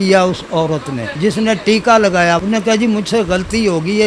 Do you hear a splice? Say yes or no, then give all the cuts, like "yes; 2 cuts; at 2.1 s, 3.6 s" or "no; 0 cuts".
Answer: yes; 2 cuts; at 1.0 s, 2.4 s